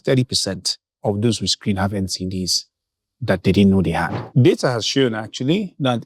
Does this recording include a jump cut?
yes; 1 cut; at 4.2 s

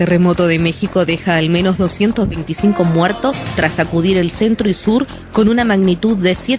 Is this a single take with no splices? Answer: yes; 0 cuts

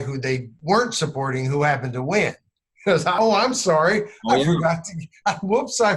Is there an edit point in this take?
yes; 1 cut; at 3.2 s

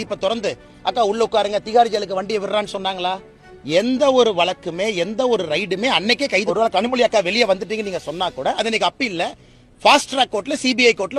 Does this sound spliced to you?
yes; 1 cut; at 6.5 s

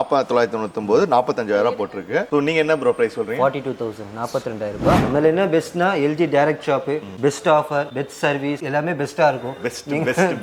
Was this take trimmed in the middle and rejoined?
yes; 1 cut; at 5.0 s

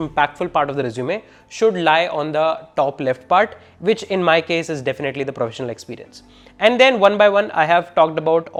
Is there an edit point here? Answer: no; 0 cuts

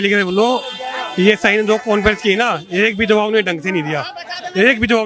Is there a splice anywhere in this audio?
no; 0 cuts

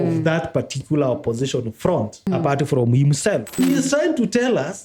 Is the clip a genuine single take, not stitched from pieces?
no; 2 cuts; at 2.3 s, 3.6 s

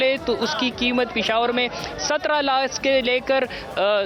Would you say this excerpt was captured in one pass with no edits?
yes; 0 cuts

